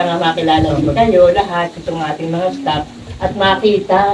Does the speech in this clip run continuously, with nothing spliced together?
yes; 0 cuts

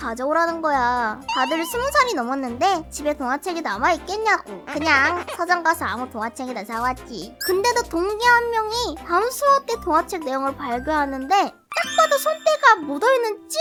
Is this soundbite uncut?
yes; 0 cuts

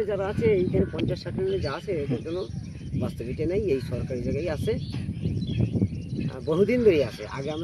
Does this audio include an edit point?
no; 0 cuts

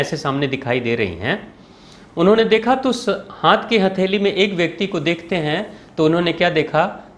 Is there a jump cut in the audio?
no; 0 cuts

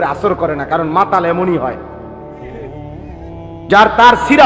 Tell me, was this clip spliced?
no; 0 cuts

